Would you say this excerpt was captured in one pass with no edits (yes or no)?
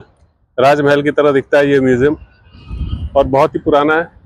yes